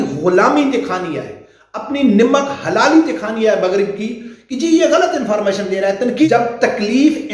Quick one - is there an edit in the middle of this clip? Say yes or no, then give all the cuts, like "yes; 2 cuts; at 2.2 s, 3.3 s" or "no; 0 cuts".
yes; 1 cut; at 6.1 s